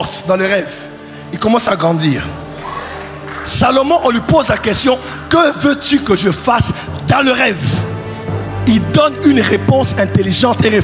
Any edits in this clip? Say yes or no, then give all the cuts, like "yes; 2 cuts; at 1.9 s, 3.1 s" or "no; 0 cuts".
no; 0 cuts